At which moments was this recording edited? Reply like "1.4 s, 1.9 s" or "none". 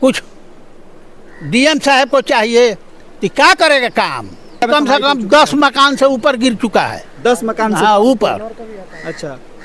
4.6 s